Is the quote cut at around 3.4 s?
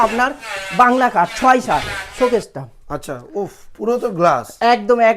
no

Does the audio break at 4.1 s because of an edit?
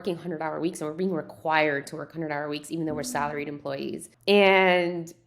yes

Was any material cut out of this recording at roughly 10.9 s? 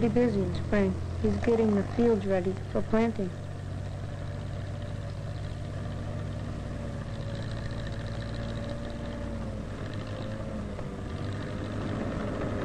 no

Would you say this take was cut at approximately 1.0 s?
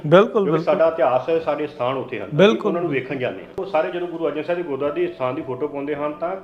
no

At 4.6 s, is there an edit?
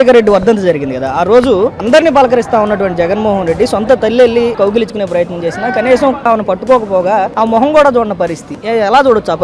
yes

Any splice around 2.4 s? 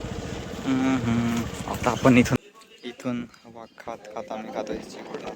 yes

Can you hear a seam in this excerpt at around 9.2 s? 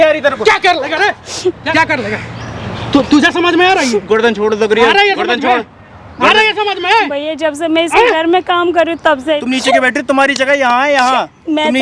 yes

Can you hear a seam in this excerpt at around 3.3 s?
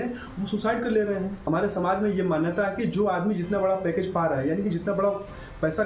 no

